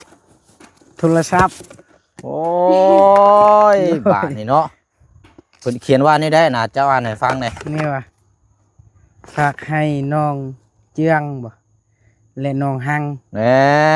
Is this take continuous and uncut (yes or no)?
yes